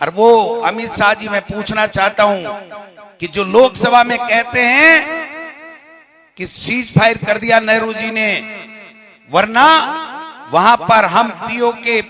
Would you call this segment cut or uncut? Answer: uncut